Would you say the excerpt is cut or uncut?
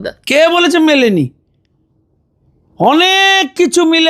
uncut